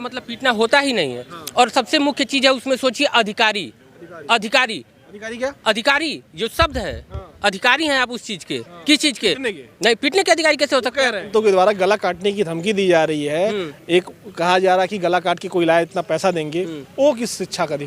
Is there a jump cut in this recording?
yes; 1 cut; at 11.3 s

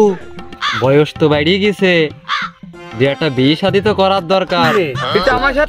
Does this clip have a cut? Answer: yes; 1 cut; at 4.7 s

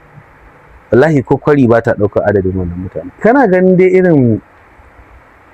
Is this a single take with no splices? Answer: no; 1 cut; at 3.2 s

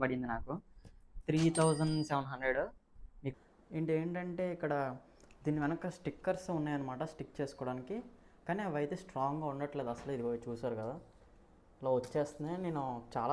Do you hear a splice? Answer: yes; 1 cut; at 3.3 s

